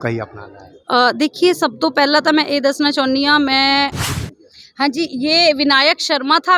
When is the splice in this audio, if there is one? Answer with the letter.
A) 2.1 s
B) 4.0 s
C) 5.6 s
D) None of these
B